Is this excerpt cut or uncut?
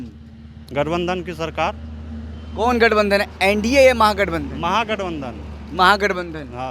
uncut